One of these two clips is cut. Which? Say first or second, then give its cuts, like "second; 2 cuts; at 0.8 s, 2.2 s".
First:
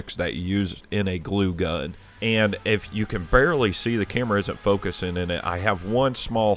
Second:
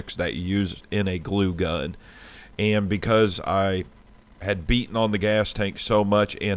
first; 1 cut; at 2.0 s